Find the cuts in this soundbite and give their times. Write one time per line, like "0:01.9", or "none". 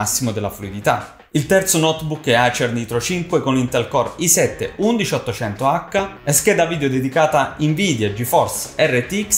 0:01.1